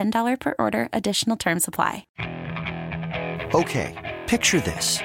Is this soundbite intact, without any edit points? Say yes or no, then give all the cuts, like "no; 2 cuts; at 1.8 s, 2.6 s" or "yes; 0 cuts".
no; 1 cut; at 2.0 s